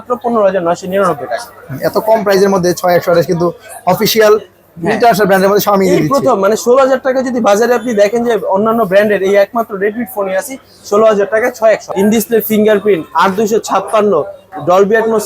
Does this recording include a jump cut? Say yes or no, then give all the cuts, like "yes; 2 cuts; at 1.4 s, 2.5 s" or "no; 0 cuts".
yes; 1 cut; at 11.9 s